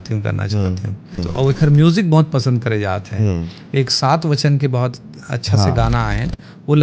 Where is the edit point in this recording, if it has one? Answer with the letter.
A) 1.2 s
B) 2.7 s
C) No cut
A